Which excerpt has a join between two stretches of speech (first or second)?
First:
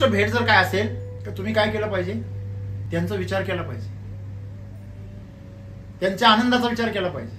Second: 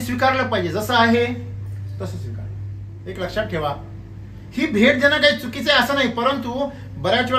second